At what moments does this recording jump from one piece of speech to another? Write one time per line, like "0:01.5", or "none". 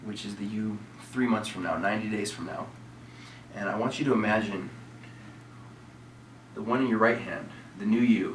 none